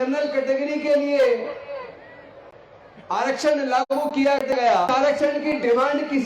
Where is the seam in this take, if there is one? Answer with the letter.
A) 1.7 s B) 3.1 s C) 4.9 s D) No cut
C